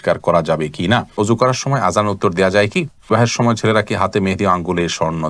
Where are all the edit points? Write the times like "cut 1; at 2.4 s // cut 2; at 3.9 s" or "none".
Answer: cut 1; at 1.1 s // cut 2; at 3.1 s